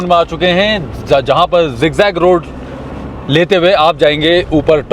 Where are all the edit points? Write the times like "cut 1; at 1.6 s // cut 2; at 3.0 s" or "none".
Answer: none

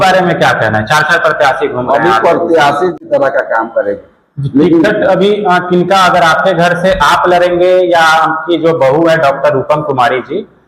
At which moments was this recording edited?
cut 1; at 3.0 s

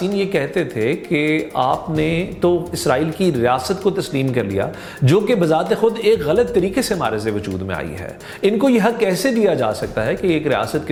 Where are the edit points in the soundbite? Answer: none

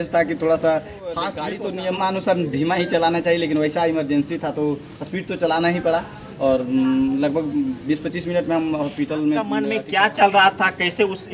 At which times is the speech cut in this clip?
cut 1; at 1.3 s // cut 2; at 9.8 s

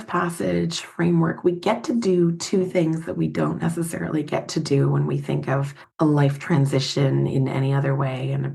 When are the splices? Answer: cut 1; at 5.8 s

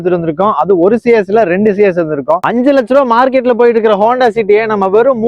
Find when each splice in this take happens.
cut 1; at 2.4 s

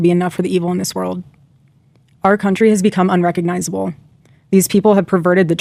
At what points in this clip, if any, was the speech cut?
none

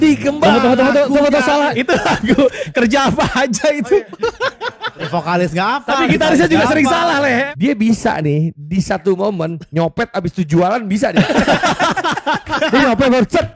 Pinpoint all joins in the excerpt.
cut 1; at 1.7 s // cut 2; at 4.9 s // cut 3; at 7.5 s

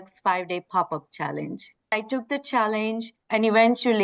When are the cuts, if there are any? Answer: cut 1; at 1.9 s // cut 2; at 3.1 s

